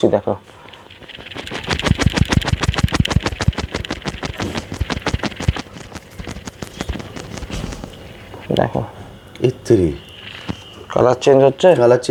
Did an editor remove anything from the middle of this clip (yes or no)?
no